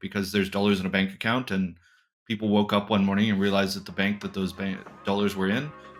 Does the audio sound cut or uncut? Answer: uncut